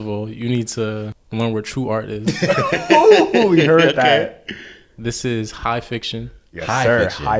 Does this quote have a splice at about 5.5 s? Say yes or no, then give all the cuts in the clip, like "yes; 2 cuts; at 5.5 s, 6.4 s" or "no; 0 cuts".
no; 1 cut; at 1.2 s